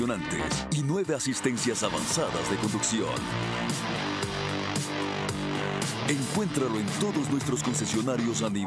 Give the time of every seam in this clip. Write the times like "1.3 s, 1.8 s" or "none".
none